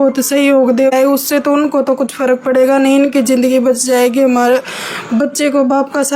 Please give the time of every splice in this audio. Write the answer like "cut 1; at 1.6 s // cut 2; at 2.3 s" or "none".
cut 1; at 0.9 s